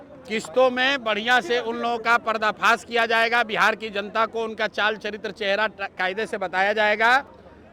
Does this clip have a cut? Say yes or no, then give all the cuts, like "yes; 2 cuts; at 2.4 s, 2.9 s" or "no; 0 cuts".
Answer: no; 0 cuts